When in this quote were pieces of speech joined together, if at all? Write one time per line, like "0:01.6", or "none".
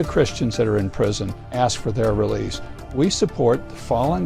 0:01.5
0:02.9